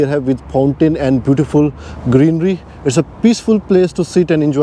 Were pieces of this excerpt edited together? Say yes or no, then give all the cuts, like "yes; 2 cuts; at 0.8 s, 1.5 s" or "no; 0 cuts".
no; 0 cuts